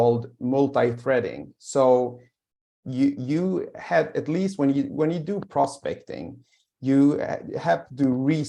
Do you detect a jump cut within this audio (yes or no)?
no